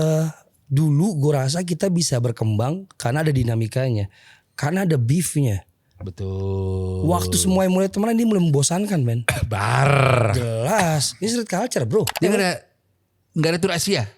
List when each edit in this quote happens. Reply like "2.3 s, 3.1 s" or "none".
12.1 s